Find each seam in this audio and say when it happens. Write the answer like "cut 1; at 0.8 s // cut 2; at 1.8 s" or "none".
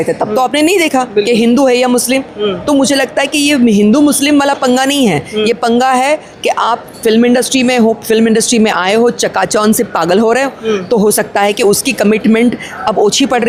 none